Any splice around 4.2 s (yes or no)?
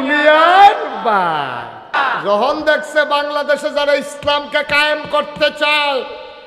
no